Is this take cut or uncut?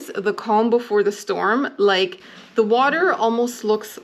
uncut